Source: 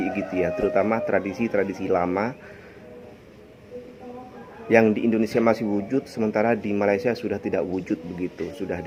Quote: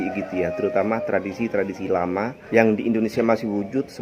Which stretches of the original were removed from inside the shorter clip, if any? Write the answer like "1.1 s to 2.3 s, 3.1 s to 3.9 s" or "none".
2.4 s to 4.6 s